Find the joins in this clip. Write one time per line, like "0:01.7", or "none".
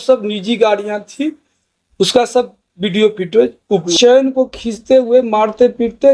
0:03.8